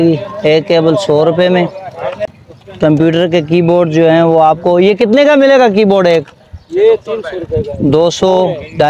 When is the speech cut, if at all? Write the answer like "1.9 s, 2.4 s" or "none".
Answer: 2.3 s